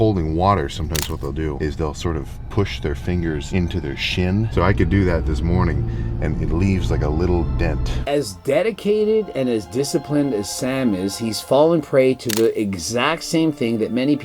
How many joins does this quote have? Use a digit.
4